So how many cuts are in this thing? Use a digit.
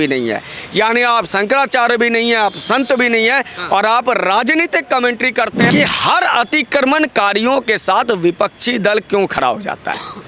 1